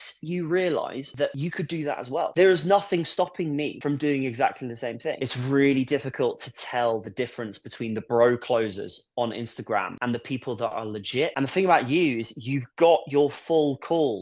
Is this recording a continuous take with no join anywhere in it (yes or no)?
no